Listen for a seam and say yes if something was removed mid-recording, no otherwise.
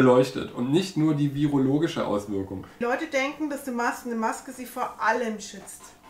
yes